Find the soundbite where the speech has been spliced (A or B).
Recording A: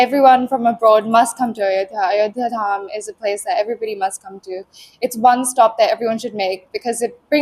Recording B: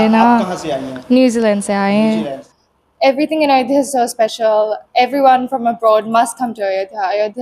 B